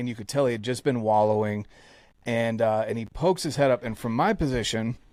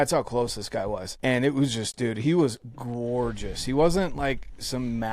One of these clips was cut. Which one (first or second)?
second